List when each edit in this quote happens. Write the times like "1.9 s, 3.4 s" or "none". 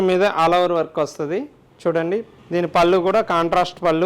1.6 s, 2.4 s